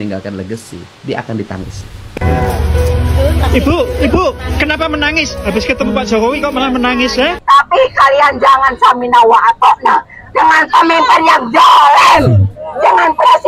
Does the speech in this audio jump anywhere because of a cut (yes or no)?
yes